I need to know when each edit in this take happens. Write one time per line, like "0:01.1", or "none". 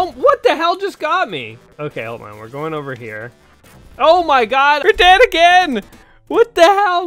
0:01.7
0:04.8